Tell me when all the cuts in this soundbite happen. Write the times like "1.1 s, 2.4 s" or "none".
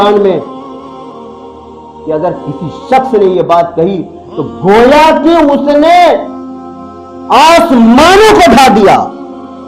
none